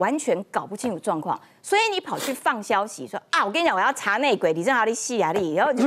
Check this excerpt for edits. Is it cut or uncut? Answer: uncut